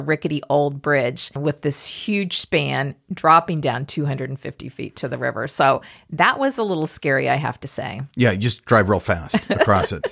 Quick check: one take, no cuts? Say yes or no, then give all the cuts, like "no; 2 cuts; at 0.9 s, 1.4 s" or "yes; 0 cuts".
no; 1 cut; at 1.4 s